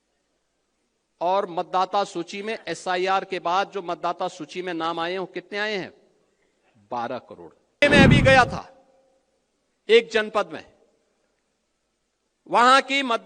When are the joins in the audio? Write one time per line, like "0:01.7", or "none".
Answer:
0:07.8